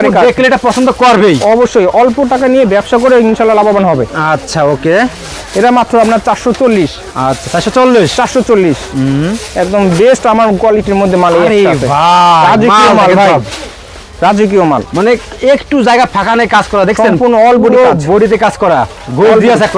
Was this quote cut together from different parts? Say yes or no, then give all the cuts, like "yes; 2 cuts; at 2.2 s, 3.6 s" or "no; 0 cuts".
no; 0 cuts